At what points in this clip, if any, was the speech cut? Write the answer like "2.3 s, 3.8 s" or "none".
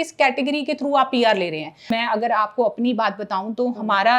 1.8 s